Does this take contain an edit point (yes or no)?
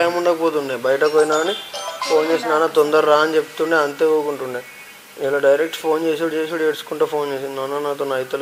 no